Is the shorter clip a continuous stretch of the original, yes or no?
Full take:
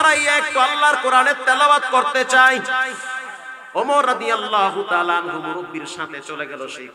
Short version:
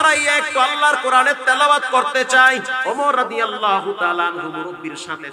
no